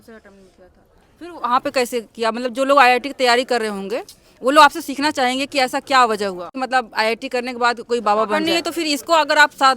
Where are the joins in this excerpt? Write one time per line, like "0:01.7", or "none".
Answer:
0:06.5
0:08.3